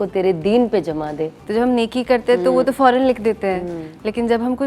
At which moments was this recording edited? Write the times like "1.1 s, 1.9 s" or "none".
1.4 s